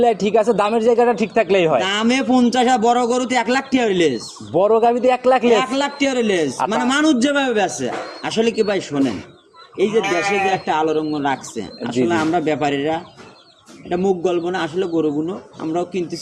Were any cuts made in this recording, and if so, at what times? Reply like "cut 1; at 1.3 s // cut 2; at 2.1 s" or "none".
none

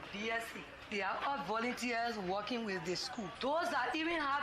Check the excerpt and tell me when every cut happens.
cut 1; at 3.3 s

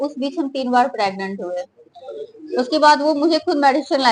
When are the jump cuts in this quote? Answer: none

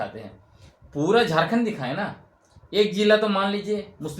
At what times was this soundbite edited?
none

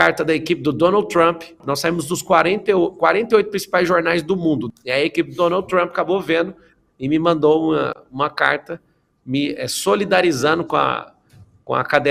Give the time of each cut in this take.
cut 1; at 1.6 s // cut 2; at 4.6 s

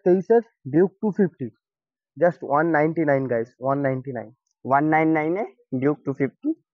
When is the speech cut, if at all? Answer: none

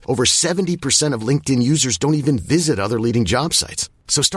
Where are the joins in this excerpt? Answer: none

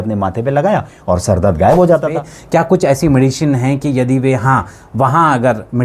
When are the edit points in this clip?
cut 1; at 2.3 s

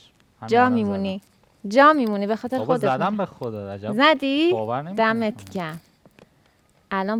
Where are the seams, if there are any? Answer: none

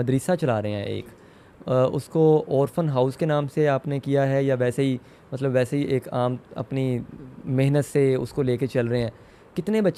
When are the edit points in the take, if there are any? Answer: none

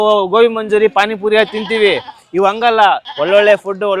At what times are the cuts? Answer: cut 1; at 3.1 s

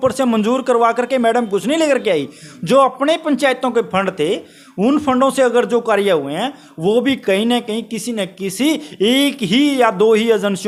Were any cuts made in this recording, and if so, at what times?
none

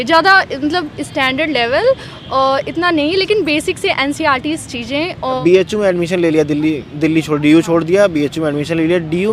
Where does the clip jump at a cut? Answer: cut 1; at 5.4 s

